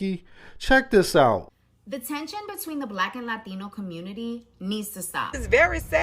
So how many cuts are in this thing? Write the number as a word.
two